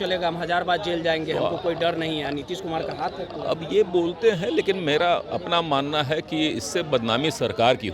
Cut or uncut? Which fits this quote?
uncut